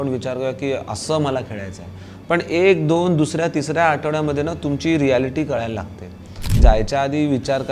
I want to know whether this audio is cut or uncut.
cut